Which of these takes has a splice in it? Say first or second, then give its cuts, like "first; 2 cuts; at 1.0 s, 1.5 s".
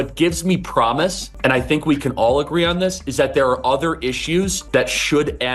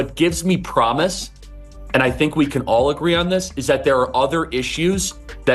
first; 2 cuts; at 1.3 s, 4.6 s